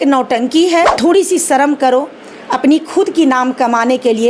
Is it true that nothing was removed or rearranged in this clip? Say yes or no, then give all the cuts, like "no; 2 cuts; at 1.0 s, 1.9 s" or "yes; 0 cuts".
no; 1 cut; at 1.0 s